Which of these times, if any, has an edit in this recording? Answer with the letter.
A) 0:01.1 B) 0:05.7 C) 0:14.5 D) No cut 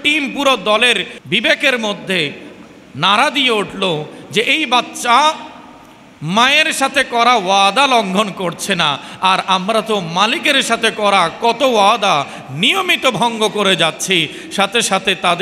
A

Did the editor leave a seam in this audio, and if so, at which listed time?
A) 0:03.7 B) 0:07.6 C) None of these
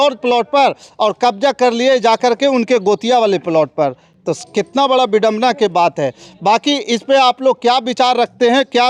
C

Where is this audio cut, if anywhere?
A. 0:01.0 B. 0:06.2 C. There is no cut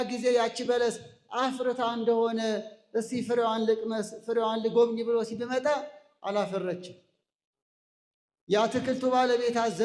C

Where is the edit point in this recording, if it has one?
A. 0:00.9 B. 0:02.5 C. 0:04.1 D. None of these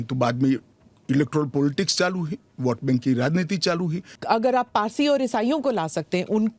C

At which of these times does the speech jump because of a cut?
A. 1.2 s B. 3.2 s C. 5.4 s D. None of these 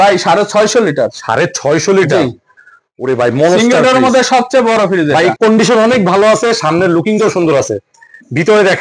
C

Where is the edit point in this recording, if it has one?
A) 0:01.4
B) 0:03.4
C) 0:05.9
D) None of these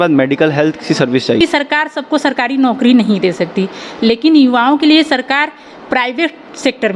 A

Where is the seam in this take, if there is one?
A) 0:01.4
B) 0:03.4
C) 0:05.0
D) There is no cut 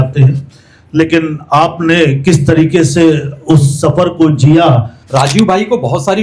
C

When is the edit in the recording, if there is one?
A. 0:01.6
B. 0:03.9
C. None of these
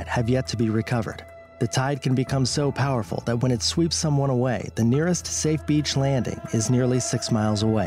C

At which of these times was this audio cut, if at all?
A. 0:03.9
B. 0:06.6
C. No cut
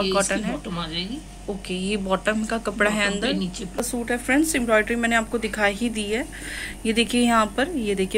A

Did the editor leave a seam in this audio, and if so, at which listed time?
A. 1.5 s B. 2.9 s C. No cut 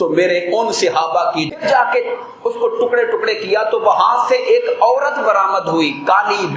A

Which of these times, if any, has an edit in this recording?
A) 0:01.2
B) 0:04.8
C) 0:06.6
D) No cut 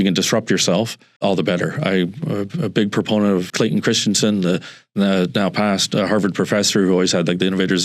A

